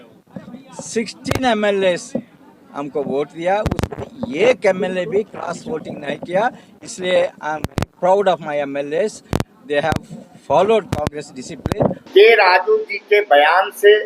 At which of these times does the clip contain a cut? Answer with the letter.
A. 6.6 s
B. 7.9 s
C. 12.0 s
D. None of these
C